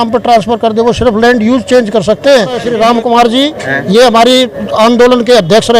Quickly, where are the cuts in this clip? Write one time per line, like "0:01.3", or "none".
0:02.7